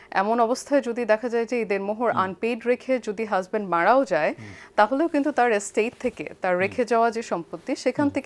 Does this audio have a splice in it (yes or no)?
no